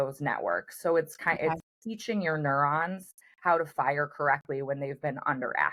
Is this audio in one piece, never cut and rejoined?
yes; 0 cuts

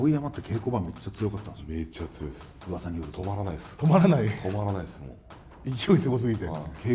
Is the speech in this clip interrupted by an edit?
no; 0 cuts

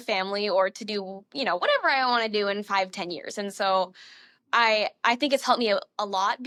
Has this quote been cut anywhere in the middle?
no; 0 cuts

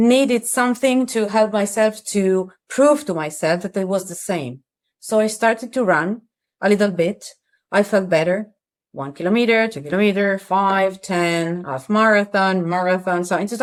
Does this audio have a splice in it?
no; 0 cuts

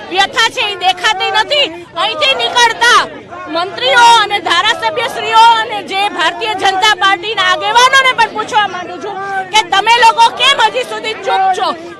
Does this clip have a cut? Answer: no; 0 cuts

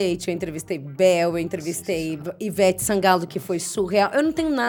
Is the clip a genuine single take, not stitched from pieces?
yes; 0 cuts

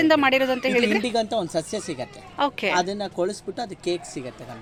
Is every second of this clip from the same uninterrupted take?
yes; 0 cuts

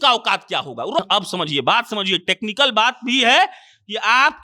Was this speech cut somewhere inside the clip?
yes; 1 cut; at 1.0 s

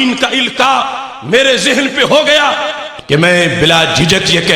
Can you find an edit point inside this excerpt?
yes; 1 cut; at 2.8 s

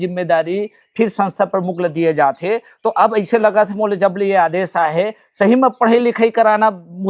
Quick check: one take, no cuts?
yes; 0 cuts

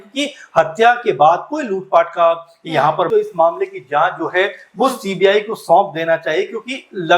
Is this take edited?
yes; 1 cut; at 3.1 s

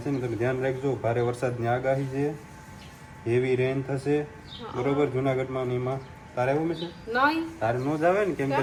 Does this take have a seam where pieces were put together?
no; 0 cuts

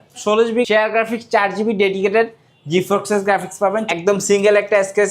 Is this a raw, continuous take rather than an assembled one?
no; 1 cut; at 3.8 s

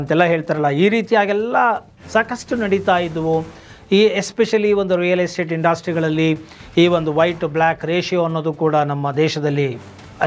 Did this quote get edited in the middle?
no; 0 cuts

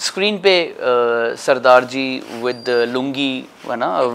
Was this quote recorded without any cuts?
yes; 0 cuts

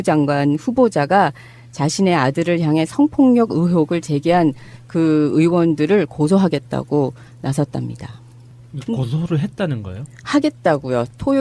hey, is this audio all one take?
no; 1 cut; at 2.1 s

